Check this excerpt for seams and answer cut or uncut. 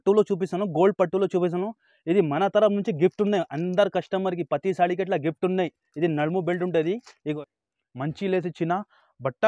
cut